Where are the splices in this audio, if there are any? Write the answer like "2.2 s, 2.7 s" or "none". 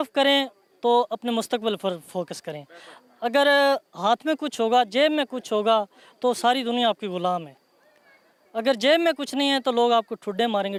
none